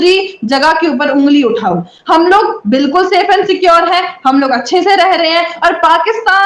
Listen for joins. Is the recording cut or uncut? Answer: uncut